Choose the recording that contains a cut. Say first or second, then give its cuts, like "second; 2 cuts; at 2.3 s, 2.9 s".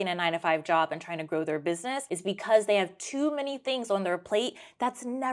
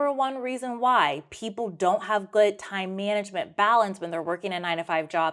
first; 1 cut; at 2.0 s